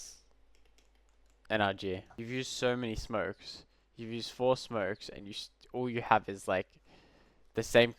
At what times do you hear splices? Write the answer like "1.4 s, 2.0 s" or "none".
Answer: 2.2 s